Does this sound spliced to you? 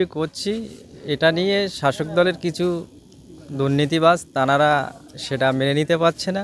no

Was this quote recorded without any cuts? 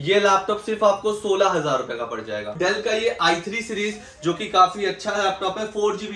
no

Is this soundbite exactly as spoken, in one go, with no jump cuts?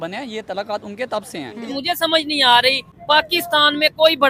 no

